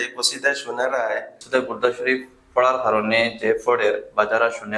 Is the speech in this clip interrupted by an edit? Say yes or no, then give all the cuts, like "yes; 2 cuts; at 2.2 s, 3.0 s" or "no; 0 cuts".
yes; 1 cut; at 1.3 s